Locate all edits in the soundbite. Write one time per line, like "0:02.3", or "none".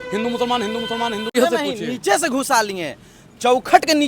0:01.3